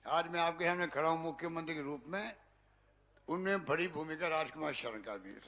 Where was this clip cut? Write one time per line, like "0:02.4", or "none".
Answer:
none